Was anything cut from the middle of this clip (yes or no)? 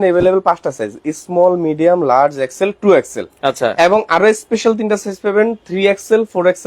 no